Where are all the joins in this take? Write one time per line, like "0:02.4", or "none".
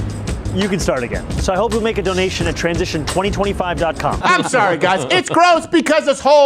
0:04.2